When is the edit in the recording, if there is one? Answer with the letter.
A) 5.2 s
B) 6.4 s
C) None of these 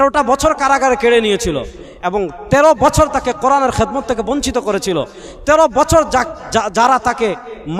C